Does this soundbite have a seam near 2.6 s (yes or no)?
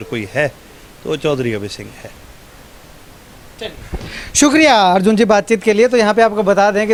no